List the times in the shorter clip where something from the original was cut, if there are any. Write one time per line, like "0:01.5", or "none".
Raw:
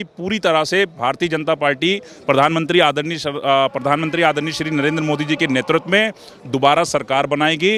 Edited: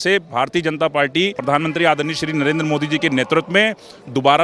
0:01.4